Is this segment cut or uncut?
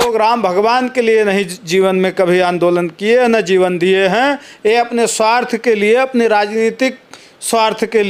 uncut